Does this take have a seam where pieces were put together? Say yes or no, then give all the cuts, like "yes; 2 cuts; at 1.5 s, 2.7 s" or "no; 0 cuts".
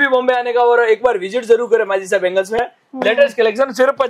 yes; 1 cut; at 2.6 s